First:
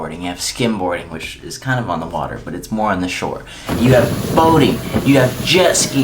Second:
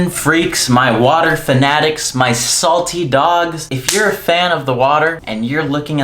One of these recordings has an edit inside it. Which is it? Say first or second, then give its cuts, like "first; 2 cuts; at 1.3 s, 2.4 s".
second; 2 cuts; at 3.7 s, 5.2 s